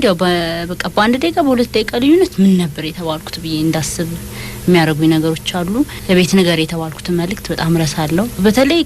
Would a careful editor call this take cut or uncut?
cut